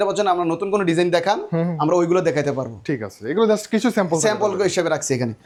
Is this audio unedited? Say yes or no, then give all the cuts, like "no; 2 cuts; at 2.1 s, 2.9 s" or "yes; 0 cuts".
yes; 0 cuts